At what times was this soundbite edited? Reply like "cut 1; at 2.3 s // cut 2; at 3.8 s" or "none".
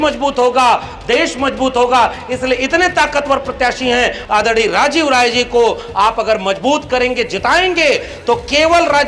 cut 1; at 4.2 s

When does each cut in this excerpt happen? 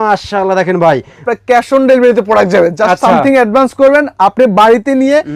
cut 1; at 1.3 s

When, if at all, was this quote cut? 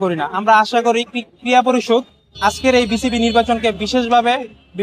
none

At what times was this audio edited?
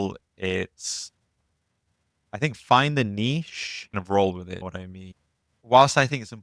none

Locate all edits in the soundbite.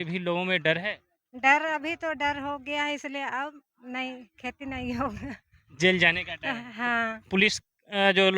cut 1; at 7.2 s

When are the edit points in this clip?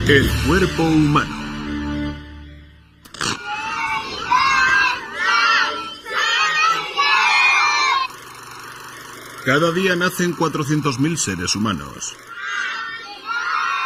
cut 1; at 10.1 s

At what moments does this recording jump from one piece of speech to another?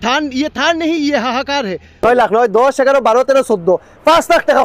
cut 1; at 2.0 s

